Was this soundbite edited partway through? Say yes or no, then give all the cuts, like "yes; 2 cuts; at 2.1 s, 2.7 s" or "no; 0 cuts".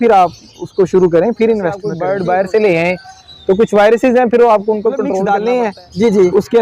yes; 2 cuts; at 1.9 s, 5.1 s